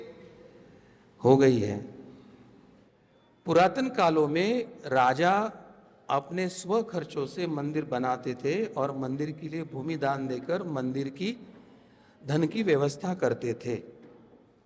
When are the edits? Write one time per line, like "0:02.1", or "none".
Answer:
0:02.9